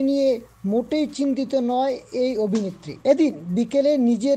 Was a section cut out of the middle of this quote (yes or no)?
yes